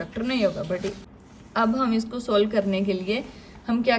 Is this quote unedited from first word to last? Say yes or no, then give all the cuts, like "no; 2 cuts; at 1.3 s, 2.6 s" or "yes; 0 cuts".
no; 1 cut; at 1.0 s